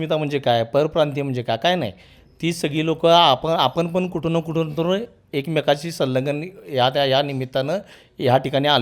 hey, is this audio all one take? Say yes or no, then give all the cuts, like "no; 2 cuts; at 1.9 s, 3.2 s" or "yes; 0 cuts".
yes; 0 cuts